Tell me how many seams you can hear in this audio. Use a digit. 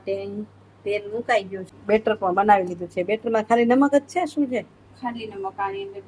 1